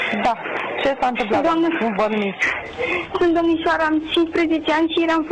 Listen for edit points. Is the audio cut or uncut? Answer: uncut